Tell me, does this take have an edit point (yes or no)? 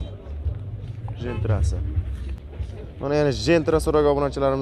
yes